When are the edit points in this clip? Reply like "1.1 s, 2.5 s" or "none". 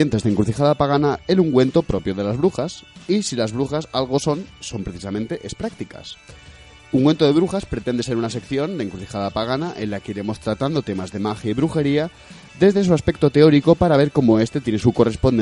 12.3 s